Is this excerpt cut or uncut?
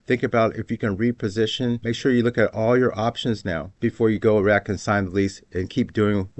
uncut